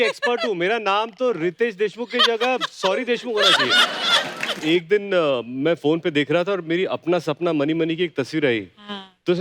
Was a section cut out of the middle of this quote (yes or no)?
yes